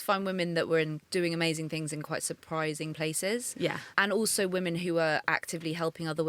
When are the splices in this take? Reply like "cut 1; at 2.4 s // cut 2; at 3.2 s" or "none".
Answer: cut 1; at 1.0 s // cut 2; at 3.9 s